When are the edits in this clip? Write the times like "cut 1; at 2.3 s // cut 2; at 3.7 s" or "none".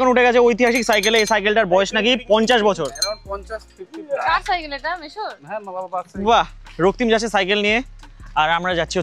none